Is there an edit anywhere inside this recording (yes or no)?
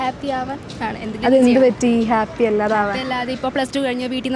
no